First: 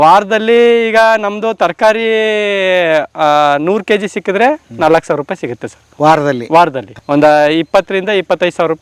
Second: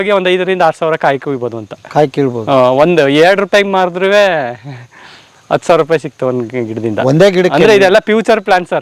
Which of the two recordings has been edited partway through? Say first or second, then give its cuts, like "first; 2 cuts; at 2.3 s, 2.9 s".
first; 1 cut; at 6.9 s